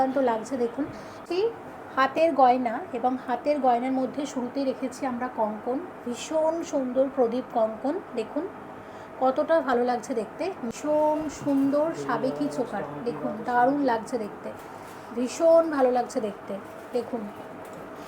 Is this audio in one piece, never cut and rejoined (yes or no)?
no